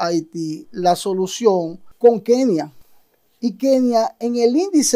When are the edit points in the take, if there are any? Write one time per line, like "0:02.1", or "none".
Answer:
none